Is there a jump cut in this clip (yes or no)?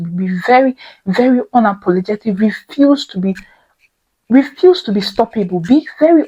no